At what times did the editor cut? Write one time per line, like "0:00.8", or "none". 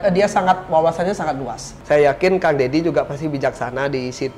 0:01.7